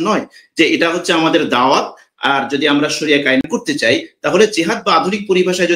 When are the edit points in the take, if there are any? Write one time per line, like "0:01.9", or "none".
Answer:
0:03.5

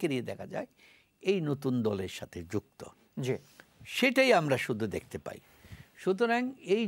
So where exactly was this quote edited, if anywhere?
none

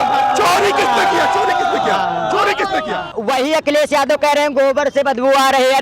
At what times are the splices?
0:03.1

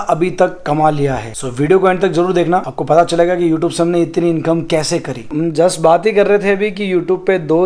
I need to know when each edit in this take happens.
0:05.3

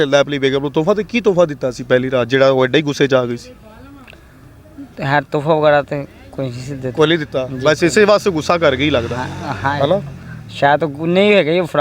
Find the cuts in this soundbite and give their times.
none

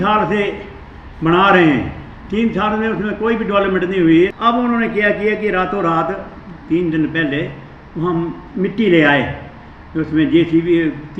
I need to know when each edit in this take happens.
0:04.3

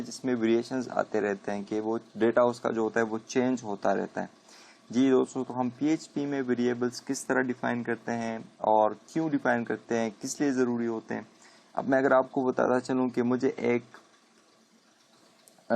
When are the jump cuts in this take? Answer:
0:09.8

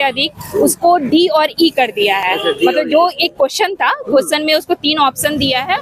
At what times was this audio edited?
none

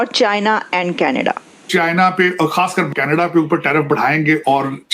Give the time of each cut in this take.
0:01.6
0:02.9

